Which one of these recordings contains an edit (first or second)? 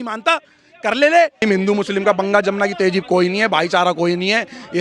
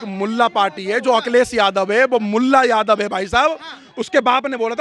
first